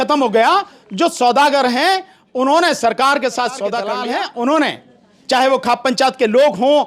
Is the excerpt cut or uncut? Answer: cut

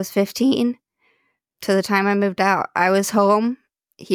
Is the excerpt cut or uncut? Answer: uncut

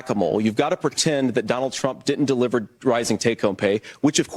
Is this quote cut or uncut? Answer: uncut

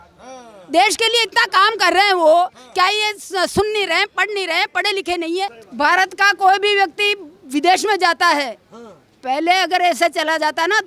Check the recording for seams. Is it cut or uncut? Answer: cut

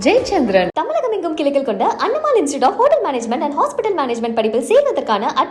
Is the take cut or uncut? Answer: uncut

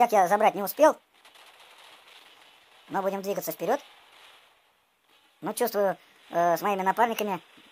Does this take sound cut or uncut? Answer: uncut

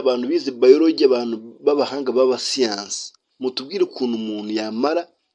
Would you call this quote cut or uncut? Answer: uncut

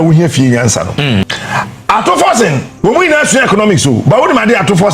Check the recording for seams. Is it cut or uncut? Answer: cut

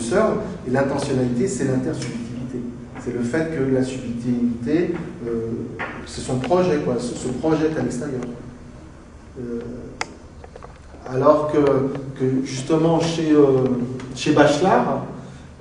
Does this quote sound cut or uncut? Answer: uncut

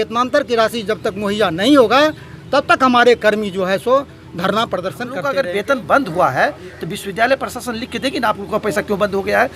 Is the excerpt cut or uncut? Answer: cut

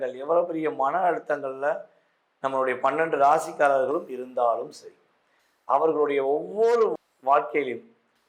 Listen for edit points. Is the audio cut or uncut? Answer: uncut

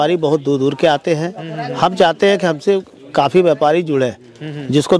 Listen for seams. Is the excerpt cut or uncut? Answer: uncut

